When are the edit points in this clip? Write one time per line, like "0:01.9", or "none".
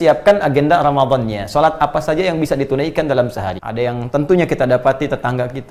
0:03.6